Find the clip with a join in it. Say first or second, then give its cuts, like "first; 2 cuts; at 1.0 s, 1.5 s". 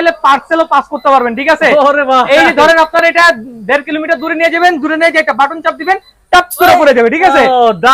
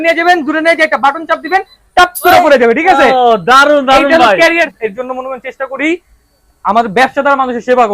second; 1 cut; at 4.7 s